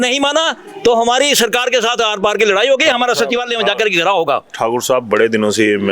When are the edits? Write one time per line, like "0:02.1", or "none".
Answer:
none